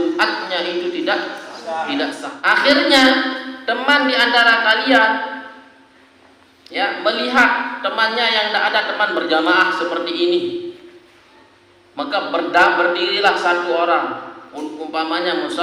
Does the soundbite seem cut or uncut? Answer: cut